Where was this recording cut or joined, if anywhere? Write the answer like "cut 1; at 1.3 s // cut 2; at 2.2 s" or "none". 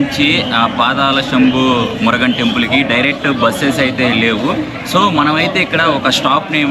none